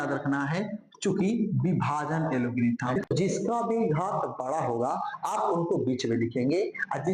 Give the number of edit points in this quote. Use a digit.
1